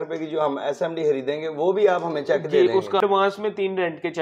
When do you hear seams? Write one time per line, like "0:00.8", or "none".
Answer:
0:03.0